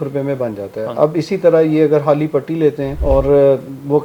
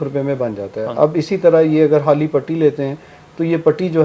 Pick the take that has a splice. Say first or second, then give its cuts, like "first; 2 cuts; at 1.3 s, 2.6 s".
first; 1 cut; at 2.9 s